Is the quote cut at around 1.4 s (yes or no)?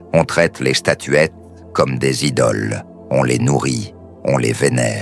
no